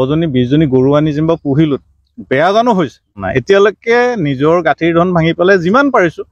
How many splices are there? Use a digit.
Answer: 1